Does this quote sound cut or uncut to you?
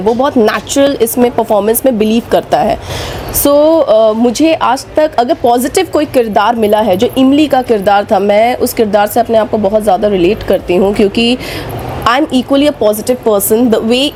uncut